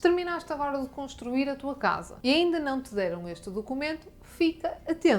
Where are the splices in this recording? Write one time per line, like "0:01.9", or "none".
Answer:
0:02.1